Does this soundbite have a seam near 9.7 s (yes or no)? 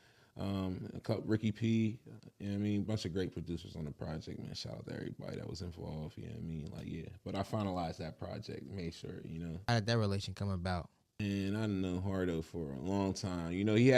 yes